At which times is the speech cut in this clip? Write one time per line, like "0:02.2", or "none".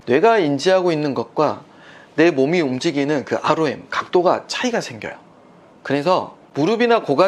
none